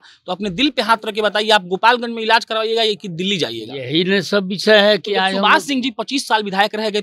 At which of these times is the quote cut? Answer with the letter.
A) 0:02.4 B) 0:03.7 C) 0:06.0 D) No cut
D